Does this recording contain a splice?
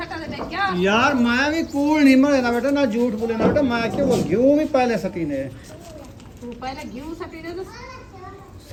no; 0 cuts

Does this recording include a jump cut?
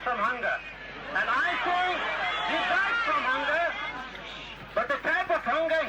no; 0 cuts

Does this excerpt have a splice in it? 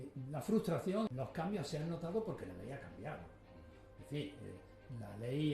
yes; 1 cut; at 1.1 s

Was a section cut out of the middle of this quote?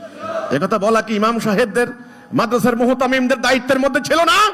no; 0 cuts

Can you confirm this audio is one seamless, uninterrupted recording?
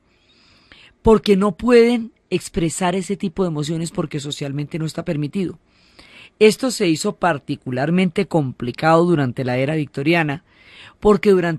no; 1 cut; at 1.6 s

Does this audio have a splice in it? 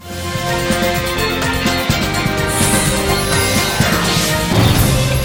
no; 0 cuts

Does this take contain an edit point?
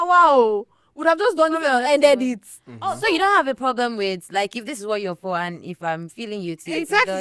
no; 0 cuts

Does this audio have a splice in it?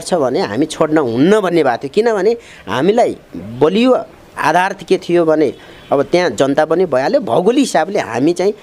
no; 0 cuts

